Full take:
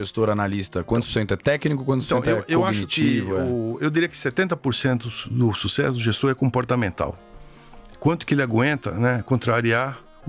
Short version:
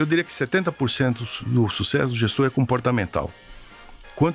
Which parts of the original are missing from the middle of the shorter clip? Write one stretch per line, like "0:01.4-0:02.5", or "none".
none